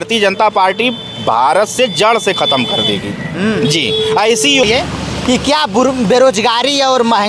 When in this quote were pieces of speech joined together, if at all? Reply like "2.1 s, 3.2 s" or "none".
4.6 s

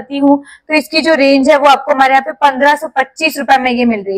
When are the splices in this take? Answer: none

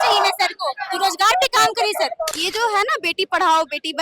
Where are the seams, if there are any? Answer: 2.3 s

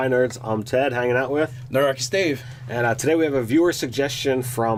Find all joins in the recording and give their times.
none

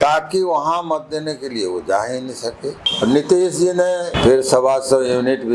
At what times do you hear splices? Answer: 2.9 s, 4.1 s

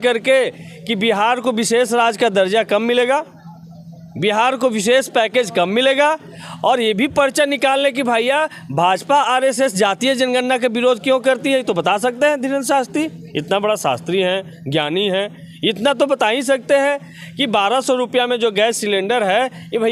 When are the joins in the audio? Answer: none

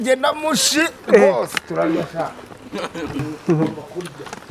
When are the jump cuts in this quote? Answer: 3.3 s

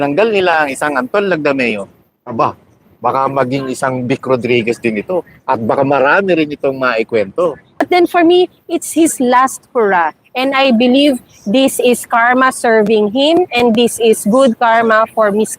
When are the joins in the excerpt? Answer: 7.9 s

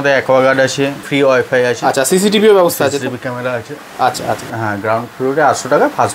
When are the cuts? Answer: 1.1 s, 4.5 s

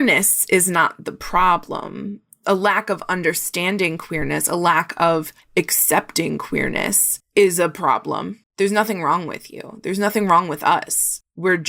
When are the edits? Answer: 8.4 s

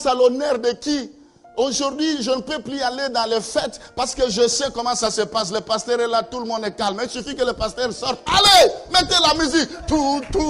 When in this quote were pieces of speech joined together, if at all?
none

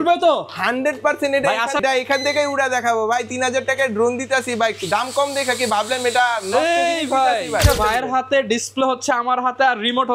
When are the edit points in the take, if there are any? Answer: 1.8 s, 7.6 s

